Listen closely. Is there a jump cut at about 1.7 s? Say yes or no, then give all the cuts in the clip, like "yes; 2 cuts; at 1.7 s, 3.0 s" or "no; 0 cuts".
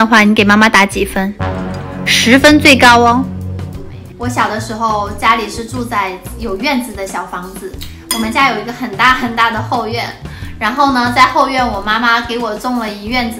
no; 1 cut; at 3.5 s